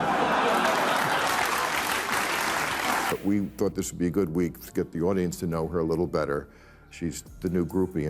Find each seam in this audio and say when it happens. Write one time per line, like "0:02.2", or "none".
0:03.1